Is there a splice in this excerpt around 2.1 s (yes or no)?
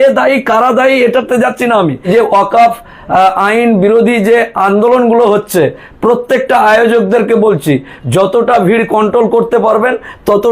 yes